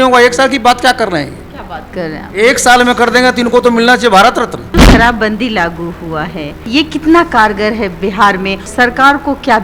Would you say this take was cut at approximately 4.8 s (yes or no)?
yes